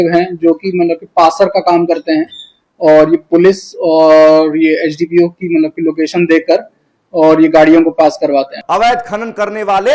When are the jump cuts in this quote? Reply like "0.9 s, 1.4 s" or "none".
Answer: 8.6 s